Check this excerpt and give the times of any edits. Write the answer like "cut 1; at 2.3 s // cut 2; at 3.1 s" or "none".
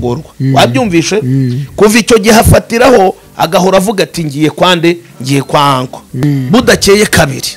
cut 1; at 6.2 s

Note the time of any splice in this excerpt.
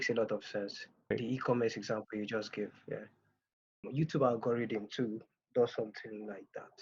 cut 1; at 1.1 s // cut 2; at 3.8 s

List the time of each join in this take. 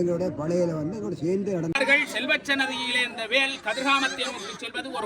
cut 1; at 1.8 s

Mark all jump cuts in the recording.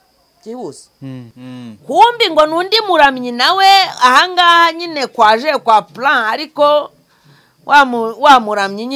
cut 1; at 1.3 s

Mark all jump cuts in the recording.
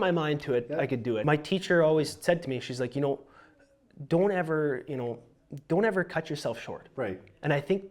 cut 1; at 1.2 s

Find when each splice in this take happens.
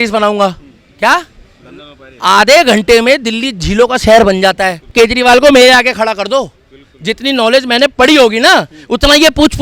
cut 1; at 4.9 s

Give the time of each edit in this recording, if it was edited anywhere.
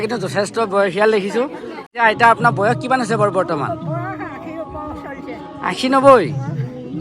cut 1; at 1.9 s

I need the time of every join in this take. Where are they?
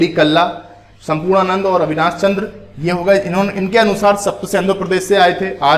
none

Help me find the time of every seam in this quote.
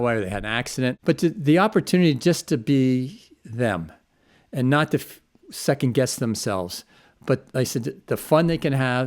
cut 1; at 1.0 s

